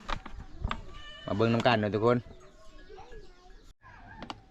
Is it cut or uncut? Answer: uncut